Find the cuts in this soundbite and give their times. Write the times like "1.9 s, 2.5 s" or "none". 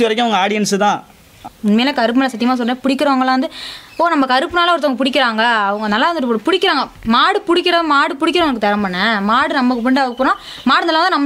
1.4 s